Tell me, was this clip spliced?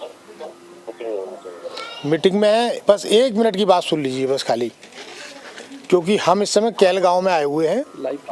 no; 0 cuts

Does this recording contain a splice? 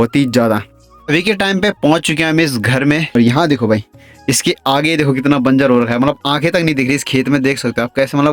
yes; 2 cuts; at 1.0 s, 3.1 s

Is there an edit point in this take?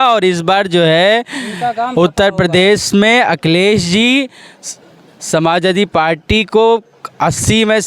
no; 0 cuts

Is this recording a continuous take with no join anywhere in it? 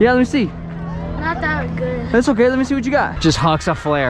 no; 1 cut; at 3.2 s

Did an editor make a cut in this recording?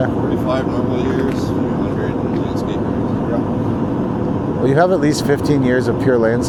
no; 0 cuts

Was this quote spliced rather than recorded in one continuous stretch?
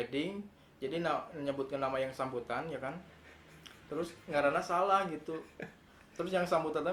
no; 0 cuts

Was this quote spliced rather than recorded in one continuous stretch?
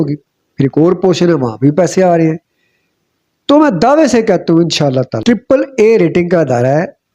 yes; 1 cut; at 5.2 s

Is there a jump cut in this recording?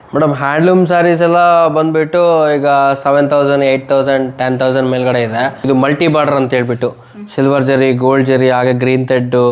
yes; 1 cut; at 5.6 s

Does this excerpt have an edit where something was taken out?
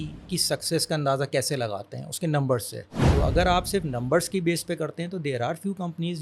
yes; 1 cut; at 2.9 s

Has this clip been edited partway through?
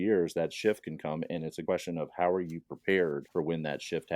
yes; 2 cuts; at 1.6 s, 3.2 s

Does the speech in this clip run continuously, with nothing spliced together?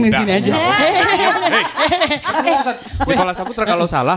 no; 1 cut; at 2.8 s

